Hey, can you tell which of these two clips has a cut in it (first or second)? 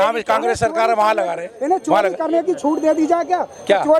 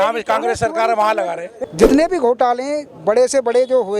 second